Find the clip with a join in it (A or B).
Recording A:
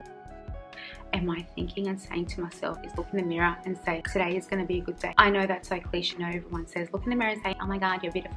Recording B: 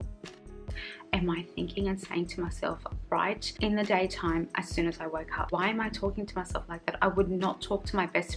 A